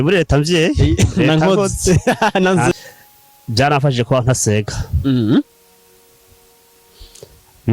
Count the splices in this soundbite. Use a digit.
1